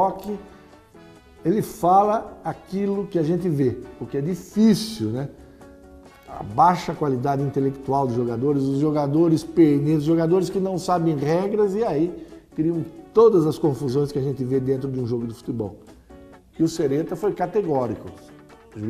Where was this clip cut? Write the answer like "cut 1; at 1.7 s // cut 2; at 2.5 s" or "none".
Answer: cut 1; at 13.0 s